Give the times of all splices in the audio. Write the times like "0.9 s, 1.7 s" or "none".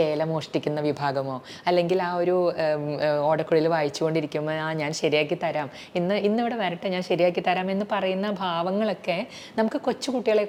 none